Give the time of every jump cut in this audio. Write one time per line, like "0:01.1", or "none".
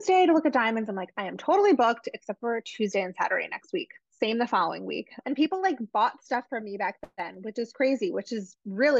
0:05.2